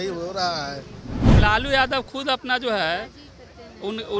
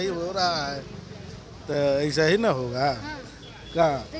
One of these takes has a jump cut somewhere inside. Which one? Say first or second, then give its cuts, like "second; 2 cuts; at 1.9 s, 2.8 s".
first; 1 cut; at 1.4 s